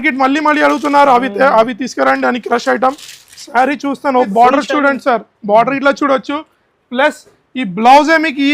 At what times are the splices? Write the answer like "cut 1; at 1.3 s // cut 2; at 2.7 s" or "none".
cut 1; at 4.3 s